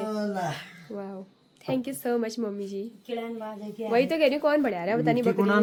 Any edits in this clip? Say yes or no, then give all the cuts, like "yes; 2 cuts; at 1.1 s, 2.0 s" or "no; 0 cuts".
no; 0 cuts